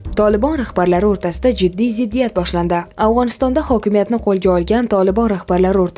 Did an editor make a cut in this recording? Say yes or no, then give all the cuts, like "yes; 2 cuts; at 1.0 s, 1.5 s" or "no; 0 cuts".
no; 0 cuts